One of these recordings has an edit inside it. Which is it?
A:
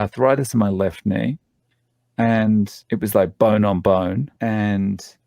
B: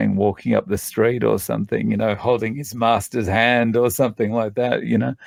A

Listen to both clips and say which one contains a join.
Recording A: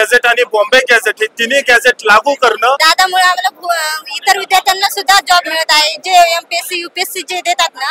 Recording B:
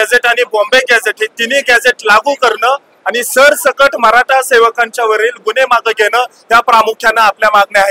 A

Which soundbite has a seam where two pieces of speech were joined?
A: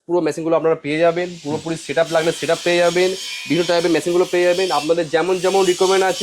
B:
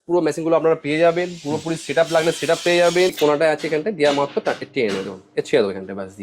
B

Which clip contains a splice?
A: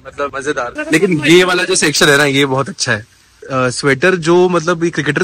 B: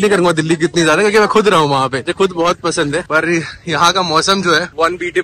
A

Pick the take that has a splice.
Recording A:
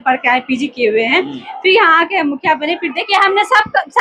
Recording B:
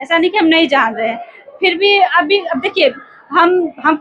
A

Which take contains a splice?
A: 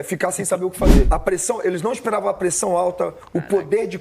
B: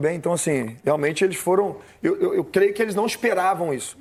A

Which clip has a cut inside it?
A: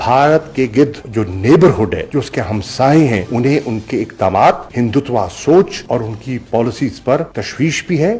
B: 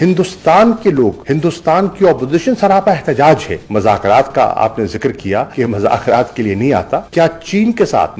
B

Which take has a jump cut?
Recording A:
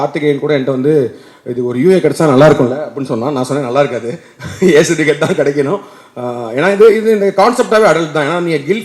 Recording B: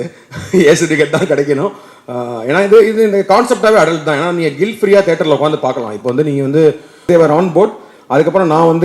B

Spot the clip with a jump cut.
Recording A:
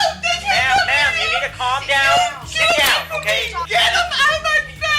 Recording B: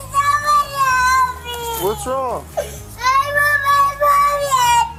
A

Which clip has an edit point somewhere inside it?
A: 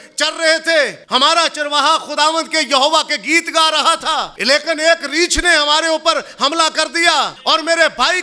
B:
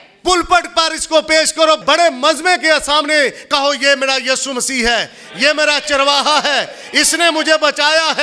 A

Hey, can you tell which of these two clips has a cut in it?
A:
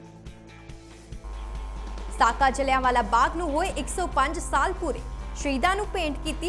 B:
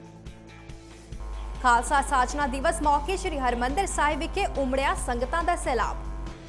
B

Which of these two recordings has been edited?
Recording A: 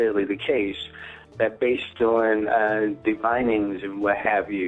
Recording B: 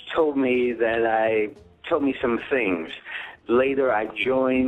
B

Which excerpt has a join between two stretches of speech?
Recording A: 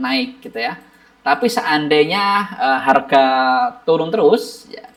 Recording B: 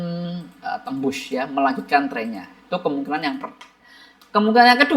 B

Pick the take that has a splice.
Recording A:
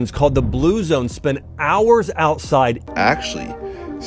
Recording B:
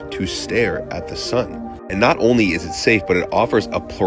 A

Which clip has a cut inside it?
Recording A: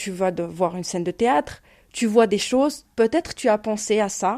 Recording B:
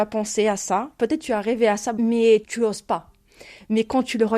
B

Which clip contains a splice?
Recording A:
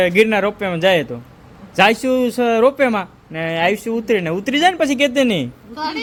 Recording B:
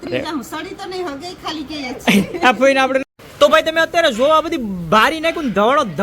B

